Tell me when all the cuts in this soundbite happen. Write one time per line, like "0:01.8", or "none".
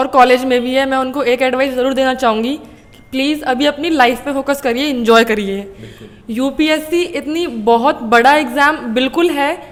none